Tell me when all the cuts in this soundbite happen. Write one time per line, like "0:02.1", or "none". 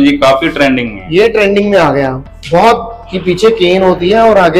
none